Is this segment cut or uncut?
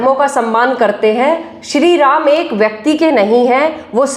uncut